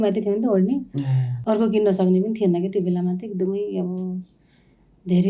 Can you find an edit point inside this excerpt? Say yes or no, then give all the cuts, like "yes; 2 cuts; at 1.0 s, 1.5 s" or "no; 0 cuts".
no; 0 cuts